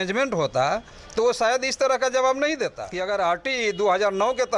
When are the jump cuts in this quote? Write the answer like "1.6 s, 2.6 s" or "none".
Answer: 2.9 s